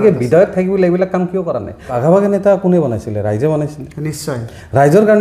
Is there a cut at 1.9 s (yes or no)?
yes